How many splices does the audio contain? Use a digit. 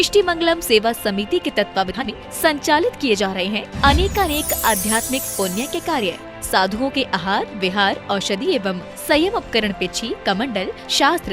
1